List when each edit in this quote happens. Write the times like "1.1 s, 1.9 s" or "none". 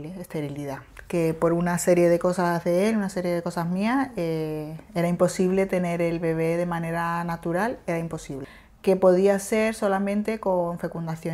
8.4 s